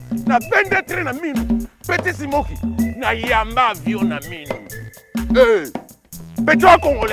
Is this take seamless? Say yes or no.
yes